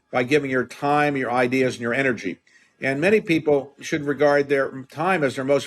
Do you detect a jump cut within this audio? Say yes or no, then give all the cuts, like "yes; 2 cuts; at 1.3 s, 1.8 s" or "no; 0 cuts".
yes; 1 cut; at 3.8 s